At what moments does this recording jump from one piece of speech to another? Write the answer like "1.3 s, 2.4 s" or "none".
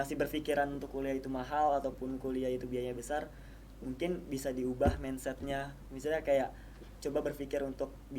none